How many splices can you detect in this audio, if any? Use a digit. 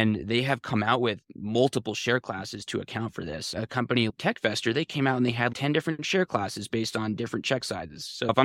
2